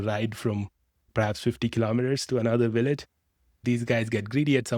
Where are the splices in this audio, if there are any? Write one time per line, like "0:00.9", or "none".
0:01.1
0:03.6